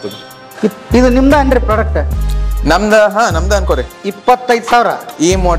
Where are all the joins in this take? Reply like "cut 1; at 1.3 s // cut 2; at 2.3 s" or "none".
none